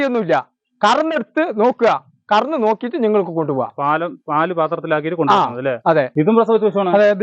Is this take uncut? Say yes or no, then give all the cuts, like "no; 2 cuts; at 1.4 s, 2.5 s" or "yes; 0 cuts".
no; 1 cut; at 6.1 s